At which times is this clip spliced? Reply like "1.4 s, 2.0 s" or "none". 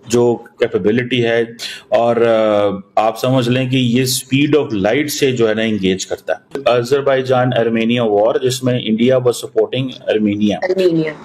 1.6 s, 6.6 s